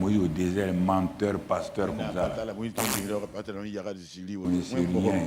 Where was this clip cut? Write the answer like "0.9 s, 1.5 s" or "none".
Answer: none

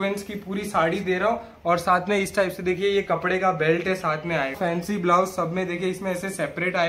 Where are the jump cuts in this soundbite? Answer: 4.6 s

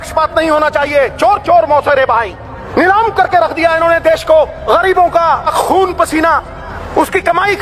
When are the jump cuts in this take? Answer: 2.6 s, 4.6 s, 5.5 s, 6.7 s

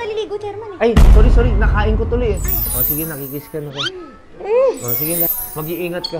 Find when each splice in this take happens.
2.6 s, 5.3 s

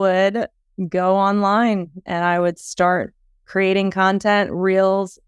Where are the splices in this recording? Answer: 3.5 s

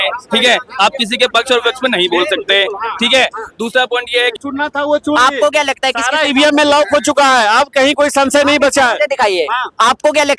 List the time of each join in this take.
4.4 s

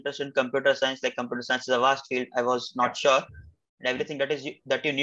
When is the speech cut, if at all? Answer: 3.6 s

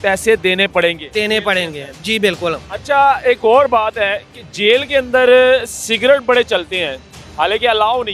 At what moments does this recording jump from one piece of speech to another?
none

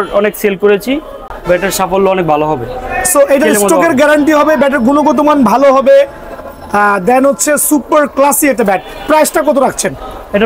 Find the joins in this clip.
none

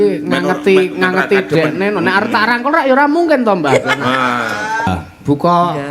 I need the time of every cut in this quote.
4.9 s

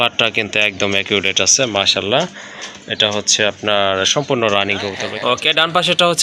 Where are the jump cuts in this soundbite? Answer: 5.0 s

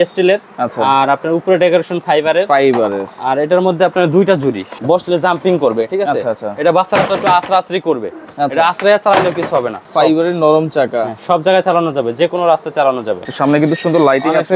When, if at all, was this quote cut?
4.7 s, 9.8 s, 13.3 s

